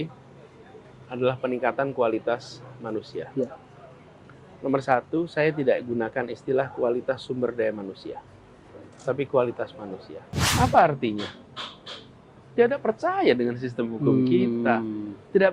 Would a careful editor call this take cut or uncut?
cut